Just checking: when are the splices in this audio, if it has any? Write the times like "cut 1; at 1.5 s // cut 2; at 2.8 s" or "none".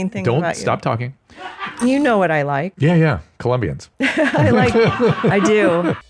cut 1; at 1.8 s // cut 2; at 2.7 s // cut 3; at 3.8 s